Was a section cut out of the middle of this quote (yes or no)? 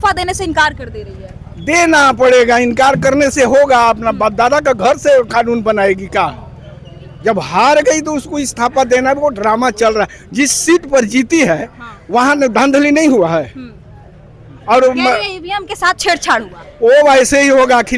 no